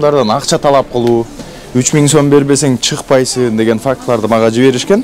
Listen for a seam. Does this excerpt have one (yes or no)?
no